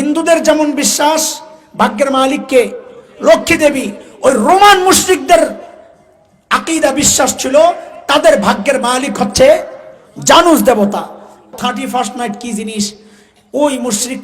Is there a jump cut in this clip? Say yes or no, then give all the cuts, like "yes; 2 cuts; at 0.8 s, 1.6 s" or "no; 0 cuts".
yes; 1 cut; at 11.5 s